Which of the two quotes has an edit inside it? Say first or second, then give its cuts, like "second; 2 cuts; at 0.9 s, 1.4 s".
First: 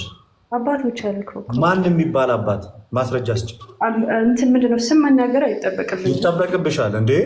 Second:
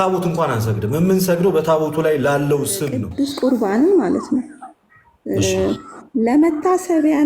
second; 1 cut; at 3.0 s